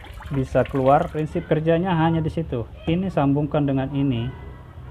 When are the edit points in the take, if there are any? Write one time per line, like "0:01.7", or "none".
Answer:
0:01.1